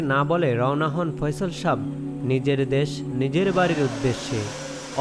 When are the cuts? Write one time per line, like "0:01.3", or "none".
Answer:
none